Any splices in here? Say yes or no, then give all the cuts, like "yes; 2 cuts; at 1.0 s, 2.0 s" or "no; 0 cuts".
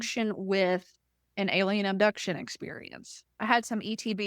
yes; 1 cut; at 3.2 s